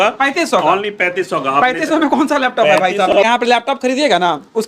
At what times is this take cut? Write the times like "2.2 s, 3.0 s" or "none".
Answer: 3.1 s